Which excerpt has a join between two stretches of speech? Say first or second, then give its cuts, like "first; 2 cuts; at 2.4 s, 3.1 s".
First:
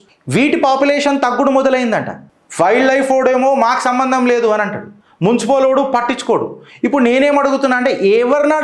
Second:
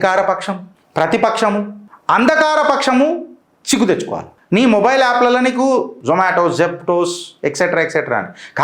second; 2 cuts; at 4.3 s, 5.9 s